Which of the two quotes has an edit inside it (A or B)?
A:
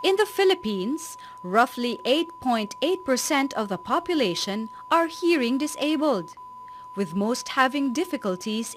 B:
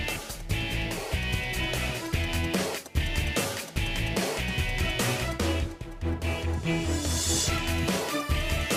A